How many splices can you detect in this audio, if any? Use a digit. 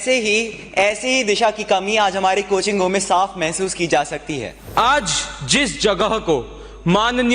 1